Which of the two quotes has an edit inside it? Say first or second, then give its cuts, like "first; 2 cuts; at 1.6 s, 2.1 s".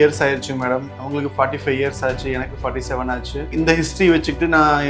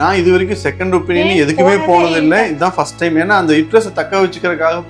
first; 2 cuts; at 1.0 s, 3.5 s